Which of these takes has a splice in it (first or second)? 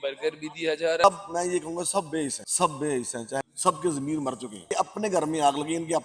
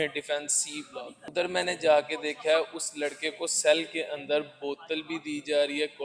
first